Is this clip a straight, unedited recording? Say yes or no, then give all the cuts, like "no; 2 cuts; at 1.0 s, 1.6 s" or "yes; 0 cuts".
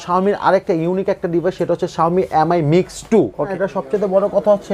no; 1 cut; at 3.5 s